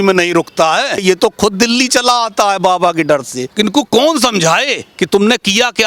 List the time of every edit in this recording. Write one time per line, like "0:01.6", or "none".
0:01.0
0:03.4